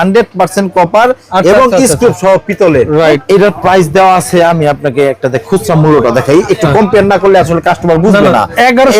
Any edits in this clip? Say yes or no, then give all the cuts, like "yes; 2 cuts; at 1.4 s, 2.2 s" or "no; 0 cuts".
yes; 1 cut; at 3.2 s